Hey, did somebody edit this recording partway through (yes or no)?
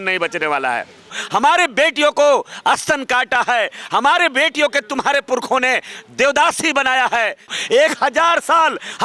yes